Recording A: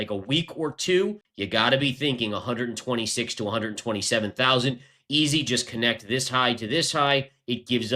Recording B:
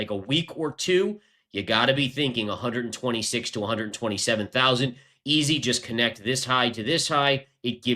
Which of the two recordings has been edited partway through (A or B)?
A